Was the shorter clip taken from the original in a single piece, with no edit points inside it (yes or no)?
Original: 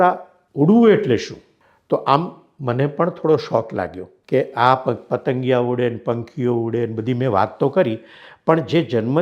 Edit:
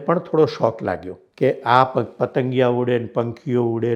yes